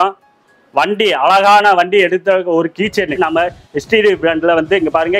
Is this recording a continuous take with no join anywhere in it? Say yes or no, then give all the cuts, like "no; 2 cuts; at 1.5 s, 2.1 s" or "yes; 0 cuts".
no; 1 cut; at 3.2 s